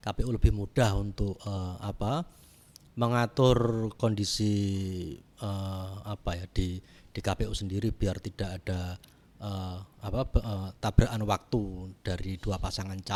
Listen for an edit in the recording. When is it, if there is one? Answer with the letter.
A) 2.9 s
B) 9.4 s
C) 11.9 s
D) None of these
D